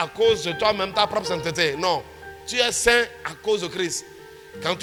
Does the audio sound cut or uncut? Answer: uncut